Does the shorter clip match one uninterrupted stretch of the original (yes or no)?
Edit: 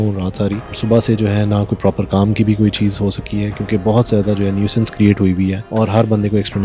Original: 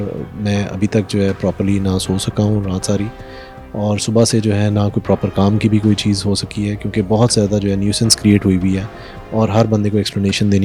no